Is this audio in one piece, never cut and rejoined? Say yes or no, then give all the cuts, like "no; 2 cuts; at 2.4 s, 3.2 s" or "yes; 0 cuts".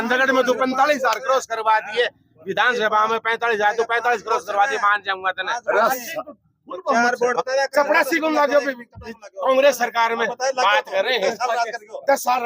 no; 1 cut; at 7.4 s